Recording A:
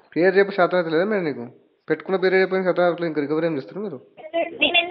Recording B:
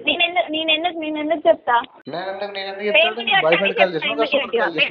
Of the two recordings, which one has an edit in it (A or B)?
B